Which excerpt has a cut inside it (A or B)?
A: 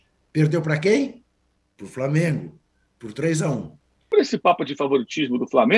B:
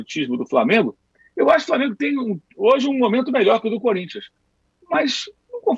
A